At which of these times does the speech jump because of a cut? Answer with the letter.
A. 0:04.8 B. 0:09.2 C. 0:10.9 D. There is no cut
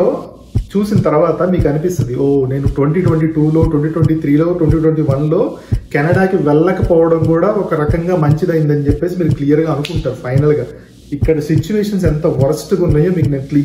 C